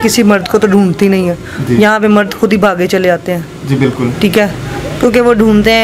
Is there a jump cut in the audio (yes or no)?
no